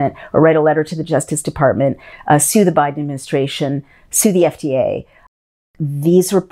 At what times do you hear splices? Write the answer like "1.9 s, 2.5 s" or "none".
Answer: 5.4 s